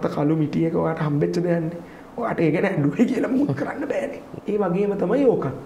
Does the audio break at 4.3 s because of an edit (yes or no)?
yes